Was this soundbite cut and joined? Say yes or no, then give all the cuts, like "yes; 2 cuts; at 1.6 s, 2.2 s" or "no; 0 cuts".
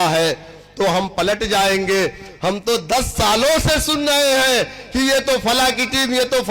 no; 0 cuts